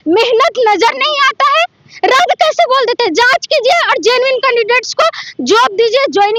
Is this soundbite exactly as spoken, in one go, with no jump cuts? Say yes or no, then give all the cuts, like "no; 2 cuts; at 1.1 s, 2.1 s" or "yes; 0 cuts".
yes; 0 cuts